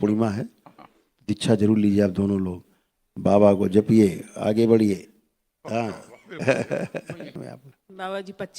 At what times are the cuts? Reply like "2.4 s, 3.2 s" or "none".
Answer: 7.4 s